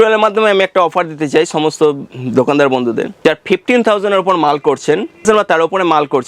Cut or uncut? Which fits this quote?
cut